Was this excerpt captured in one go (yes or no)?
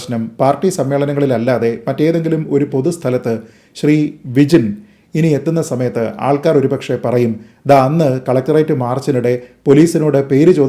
yes